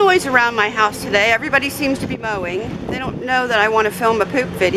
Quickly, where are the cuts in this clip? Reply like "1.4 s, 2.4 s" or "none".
2.7 s